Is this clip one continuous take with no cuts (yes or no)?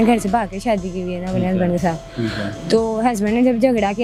yes